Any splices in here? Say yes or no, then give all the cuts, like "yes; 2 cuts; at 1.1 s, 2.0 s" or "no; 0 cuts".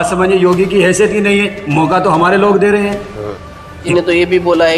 yes; 1 cut; at 3.9 s